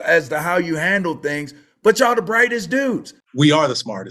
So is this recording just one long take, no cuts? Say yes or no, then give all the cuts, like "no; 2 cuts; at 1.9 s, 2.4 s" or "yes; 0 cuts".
no; 1 cut; at 3.2 s